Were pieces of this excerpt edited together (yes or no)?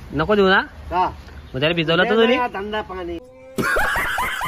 yes